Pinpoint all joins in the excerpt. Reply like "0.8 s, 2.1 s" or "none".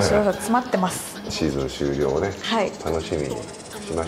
1.3 s